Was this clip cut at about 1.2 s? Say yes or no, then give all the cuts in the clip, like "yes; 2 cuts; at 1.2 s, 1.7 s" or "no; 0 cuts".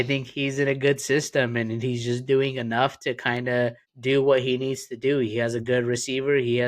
no; 1 cut; at 3.9 s